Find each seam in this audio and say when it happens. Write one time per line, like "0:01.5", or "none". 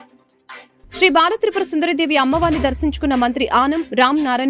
0:01.0